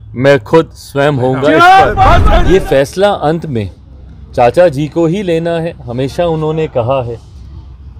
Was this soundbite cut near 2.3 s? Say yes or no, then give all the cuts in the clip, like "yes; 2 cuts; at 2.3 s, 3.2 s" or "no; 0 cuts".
yes; 1 cut; at 2.3 s